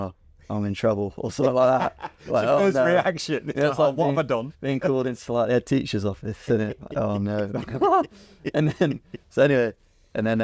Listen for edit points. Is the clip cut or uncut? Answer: uncut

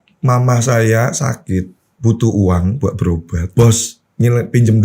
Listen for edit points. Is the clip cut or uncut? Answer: cut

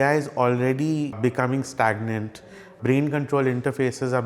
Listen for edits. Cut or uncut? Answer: cut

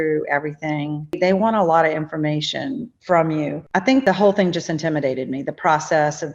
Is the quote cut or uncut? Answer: cut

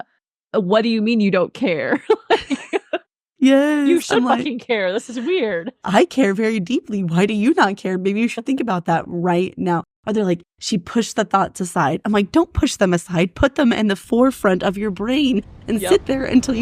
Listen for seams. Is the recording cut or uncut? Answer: uncut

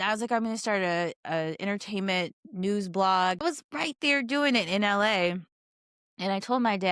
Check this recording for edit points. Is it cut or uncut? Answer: cut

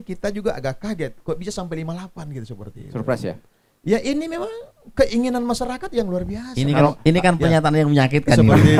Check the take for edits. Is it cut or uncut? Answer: uncut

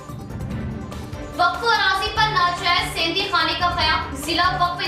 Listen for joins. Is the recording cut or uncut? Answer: cut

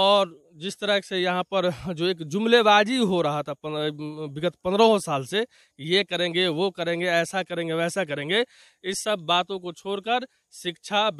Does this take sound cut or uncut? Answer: uncut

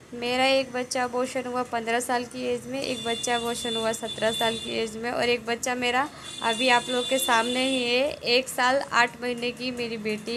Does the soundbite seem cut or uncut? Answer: uncut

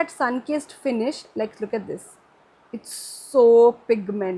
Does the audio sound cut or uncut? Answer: uncut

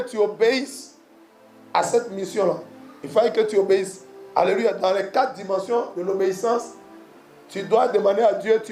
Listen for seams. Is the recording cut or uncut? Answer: uncut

